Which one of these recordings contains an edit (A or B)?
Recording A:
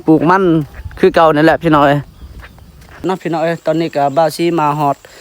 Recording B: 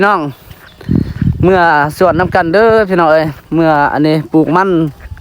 A